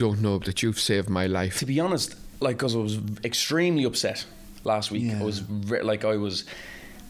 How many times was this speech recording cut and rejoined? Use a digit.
1